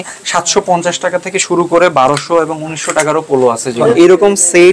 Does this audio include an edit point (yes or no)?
yes